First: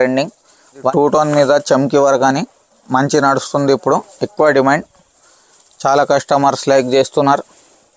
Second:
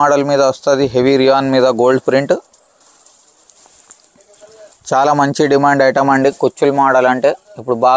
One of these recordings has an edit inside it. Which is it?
first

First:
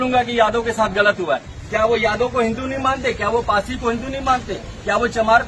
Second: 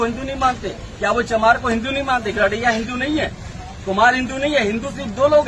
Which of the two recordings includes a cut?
first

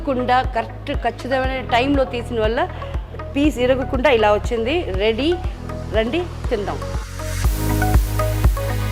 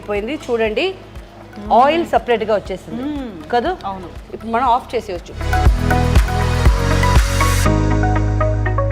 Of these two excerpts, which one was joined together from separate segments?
second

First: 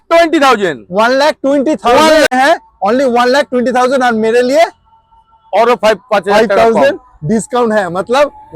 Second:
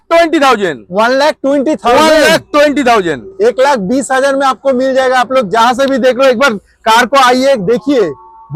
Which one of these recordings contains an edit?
first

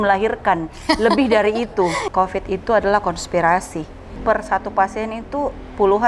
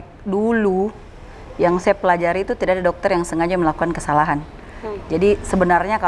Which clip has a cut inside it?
first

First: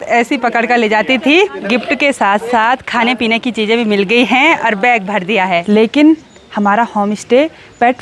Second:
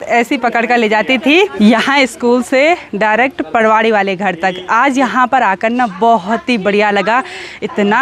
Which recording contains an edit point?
first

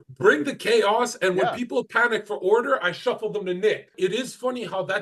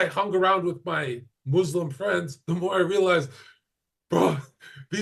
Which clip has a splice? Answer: first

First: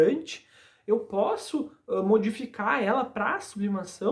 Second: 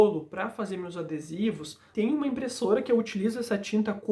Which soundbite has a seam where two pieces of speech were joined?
second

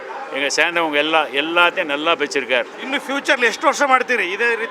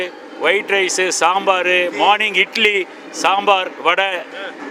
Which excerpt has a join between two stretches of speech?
first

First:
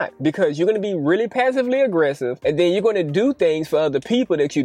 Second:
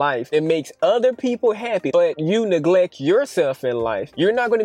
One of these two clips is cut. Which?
second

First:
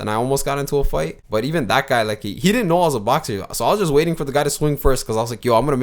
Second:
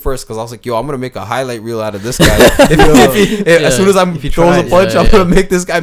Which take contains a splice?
first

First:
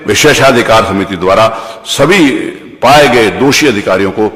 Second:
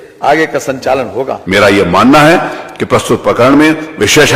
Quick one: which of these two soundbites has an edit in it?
second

